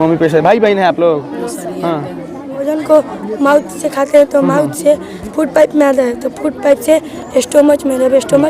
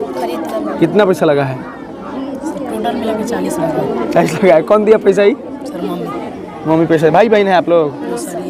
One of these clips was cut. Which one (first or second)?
first